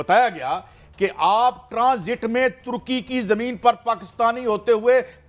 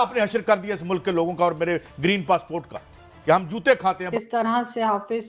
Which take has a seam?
second; 1 cut; at 4.1 s

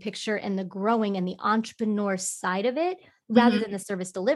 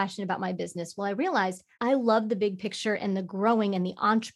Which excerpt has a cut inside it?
second; 1 cut; at 1.7 s

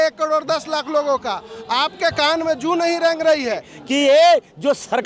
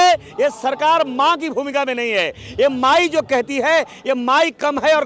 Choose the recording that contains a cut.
first; 1 cut; at 3.7 s

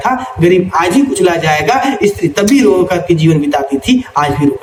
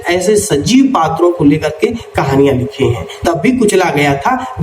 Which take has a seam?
second; 1 cut; at 3.2 s

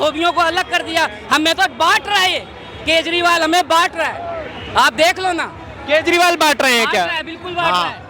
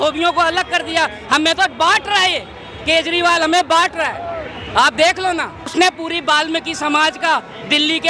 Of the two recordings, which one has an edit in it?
second; 1 cut; at 5.6 s

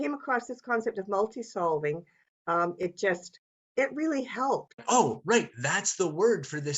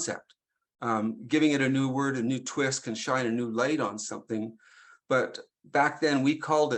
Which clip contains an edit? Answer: first; 1 cut; at 4.8 s

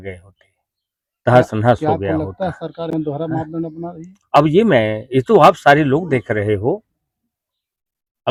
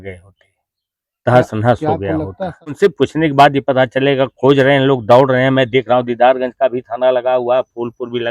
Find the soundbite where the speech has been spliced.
second; 1 cut; at 2.8 s

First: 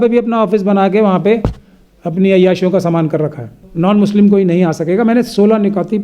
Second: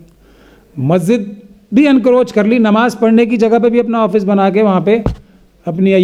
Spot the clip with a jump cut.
first; 1 cut; at 3.6 s

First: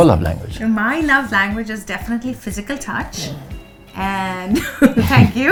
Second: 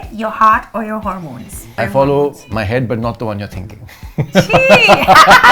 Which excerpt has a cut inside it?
second; 1 cut; at 1.7 s

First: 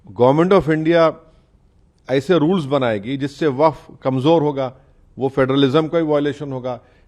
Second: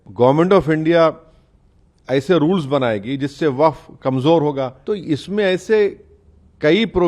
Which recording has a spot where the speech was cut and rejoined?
second; 1 cut; at 4.8 s

